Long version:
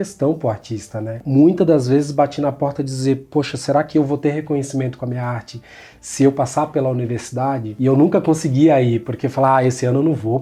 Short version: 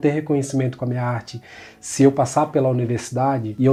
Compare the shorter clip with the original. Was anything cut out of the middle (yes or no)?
no